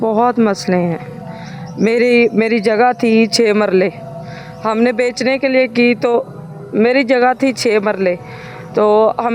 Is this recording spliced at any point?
no; 0 cuts

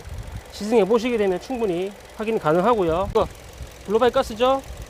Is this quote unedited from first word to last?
no; 1 cut; at 3.1 s

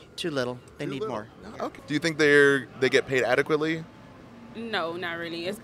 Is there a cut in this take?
yes; 1 cut; at 1.8 s

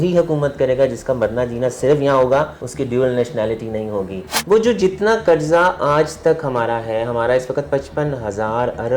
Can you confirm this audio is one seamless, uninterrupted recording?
no; 2 cuts; at 2.6 s, 4.3 s

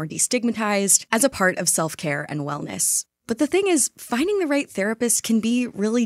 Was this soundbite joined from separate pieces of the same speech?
no; 0 cuts

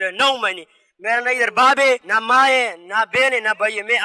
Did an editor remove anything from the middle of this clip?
yes; 1 cut; at 2.1 s

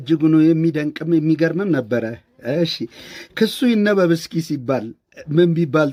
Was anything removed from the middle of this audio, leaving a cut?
no; 0 cuts

